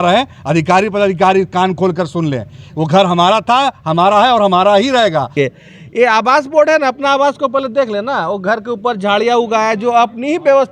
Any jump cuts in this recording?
yes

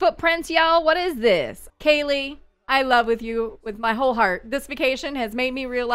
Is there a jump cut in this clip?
yes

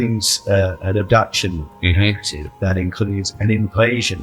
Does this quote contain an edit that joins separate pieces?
yes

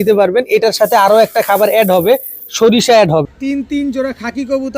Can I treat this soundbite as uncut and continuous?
no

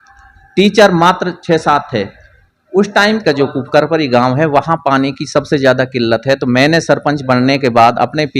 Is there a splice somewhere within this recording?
yes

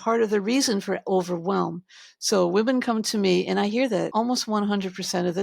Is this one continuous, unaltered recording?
no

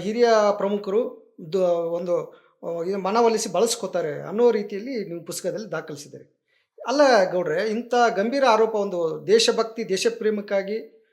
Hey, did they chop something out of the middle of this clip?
no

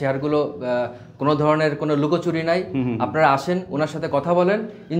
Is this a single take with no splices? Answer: yes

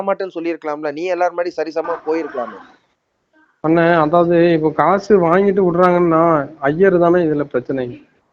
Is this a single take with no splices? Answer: yes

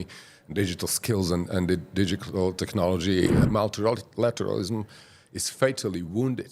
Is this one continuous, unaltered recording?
no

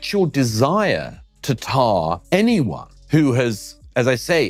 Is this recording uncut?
yes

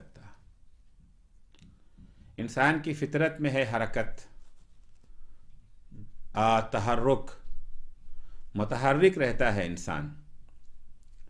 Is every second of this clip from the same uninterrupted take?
no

